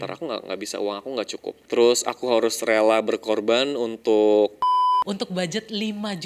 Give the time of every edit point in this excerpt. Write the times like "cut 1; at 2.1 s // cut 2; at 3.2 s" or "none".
cut 1; at 1.6 s // cut 2; at 5.0 s